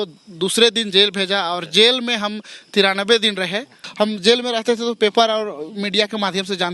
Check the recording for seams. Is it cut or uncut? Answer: cut